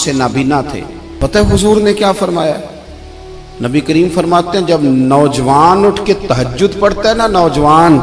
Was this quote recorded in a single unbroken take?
no; 1 cut; at 1.3 s

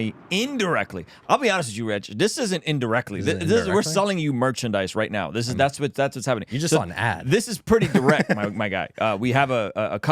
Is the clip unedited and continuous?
yes; 0 cuts

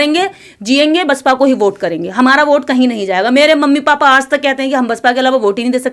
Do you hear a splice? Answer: no; 0 cuts

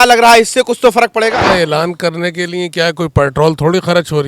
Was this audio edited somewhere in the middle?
yes; 1 cut; at 1.5 s

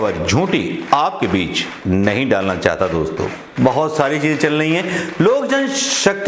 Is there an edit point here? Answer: yes; 1 cut; at 3.4 s

